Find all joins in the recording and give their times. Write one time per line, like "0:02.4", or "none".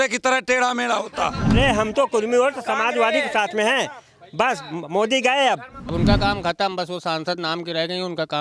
0:01.5
0:05.8

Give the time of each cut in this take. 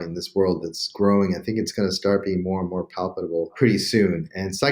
0:03.5

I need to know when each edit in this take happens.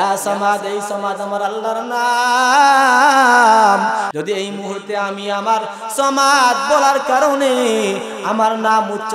0:04.1

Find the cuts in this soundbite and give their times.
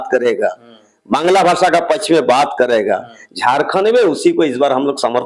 none

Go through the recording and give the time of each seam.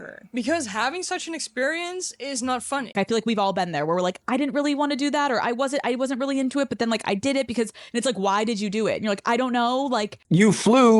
0:02.9

